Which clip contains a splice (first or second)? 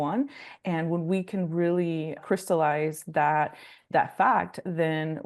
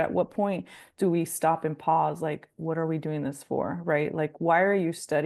first